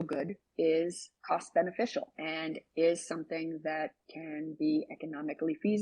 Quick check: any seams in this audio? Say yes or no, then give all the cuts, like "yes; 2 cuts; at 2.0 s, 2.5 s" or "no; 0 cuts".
yes; 2 cuts; at 1.1 s, 2.2 s